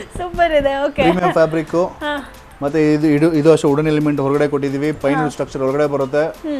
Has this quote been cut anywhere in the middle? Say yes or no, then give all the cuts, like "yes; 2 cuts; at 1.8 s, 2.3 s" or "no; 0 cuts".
no; 0 cuts